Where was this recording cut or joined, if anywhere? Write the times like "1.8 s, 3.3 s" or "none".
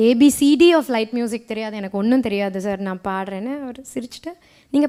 none